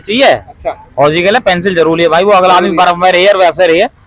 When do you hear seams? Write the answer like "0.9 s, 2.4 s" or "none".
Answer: none